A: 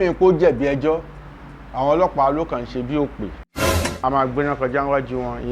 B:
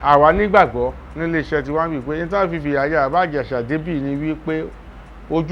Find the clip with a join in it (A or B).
A